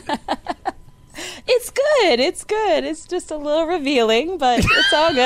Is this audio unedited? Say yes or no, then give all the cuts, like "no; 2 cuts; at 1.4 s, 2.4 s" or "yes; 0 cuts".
yes; 0 cuts